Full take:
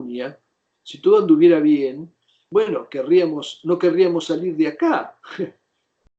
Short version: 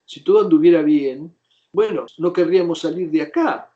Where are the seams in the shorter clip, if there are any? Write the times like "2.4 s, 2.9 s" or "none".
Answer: 2.1 s